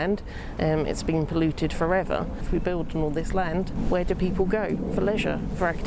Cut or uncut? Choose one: cut